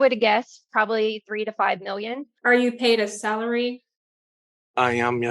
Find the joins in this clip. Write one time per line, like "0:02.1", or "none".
0:02.3